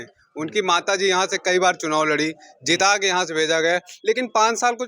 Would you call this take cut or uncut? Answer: uncut